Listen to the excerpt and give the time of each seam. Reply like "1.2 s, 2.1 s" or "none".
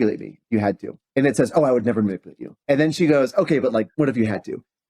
0.9 s, 2.6 s, 3.9 s